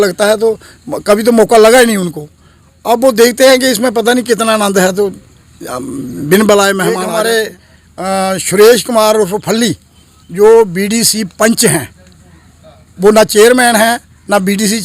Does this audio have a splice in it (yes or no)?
yes